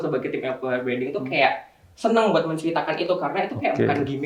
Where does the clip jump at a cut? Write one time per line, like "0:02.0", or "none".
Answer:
none

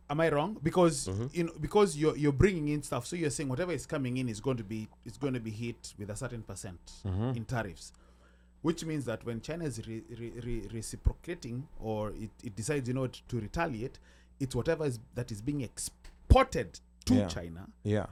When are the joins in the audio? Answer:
none

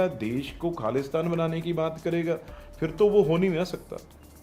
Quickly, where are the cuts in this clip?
none

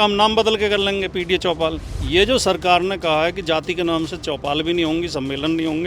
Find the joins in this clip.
0:01.9

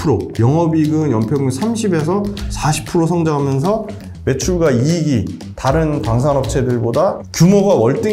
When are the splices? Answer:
none

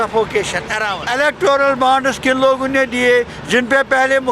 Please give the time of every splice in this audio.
0:01.0

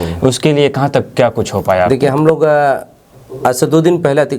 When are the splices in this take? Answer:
none

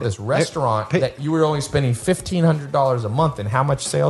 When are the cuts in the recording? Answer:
none

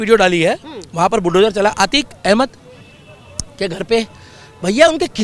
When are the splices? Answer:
none

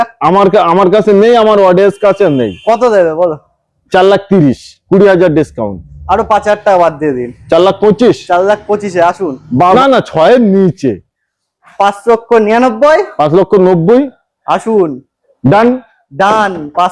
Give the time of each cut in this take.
0:09.7

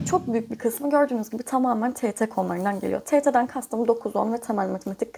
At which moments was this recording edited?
none

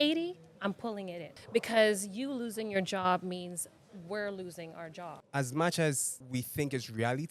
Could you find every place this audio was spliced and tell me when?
0:01.4
0:05.2
0:06.1

